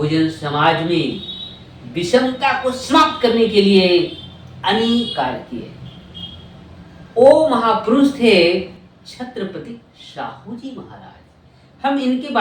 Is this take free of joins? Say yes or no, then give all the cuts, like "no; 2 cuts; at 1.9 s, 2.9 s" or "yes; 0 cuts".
yes; 0 cuts